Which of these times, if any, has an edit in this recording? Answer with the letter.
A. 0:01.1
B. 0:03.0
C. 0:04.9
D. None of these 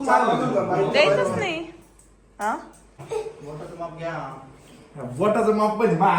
B